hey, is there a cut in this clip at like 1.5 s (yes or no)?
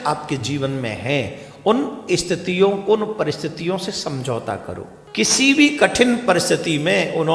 no